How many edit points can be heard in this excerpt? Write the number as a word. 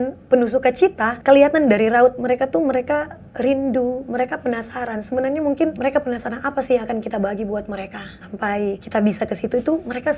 three